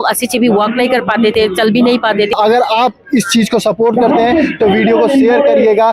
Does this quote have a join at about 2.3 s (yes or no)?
yes